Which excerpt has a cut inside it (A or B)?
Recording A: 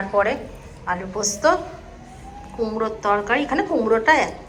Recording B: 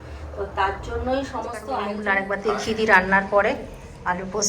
B